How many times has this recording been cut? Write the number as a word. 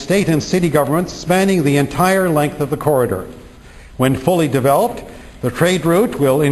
one